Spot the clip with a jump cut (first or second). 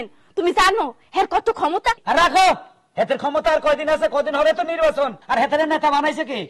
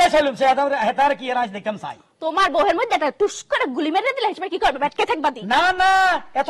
first